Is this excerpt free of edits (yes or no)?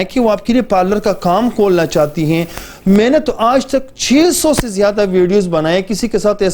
yes